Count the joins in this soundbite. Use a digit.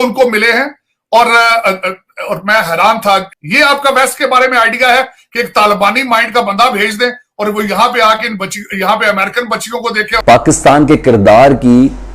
2